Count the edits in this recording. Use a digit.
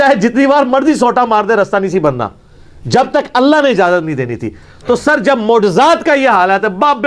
0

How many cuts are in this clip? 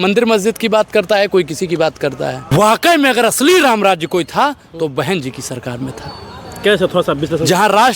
1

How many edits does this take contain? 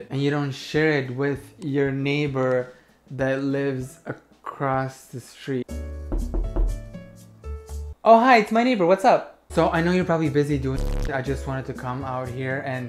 1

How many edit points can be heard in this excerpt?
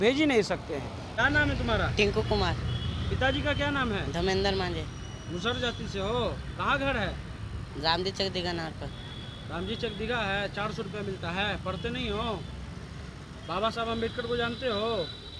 1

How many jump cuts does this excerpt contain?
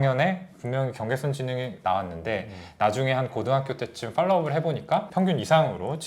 0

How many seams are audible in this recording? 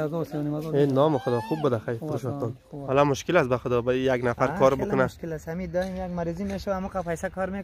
1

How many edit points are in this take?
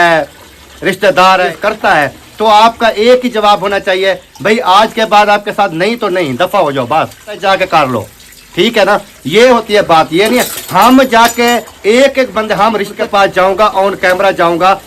3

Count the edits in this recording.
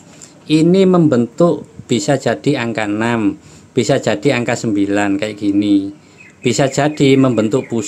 0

